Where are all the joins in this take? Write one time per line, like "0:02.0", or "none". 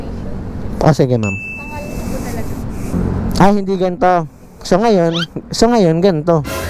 0:02.9